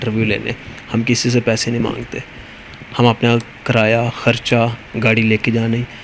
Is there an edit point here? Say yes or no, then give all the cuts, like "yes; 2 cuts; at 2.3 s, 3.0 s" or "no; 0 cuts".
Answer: no; 0 cuts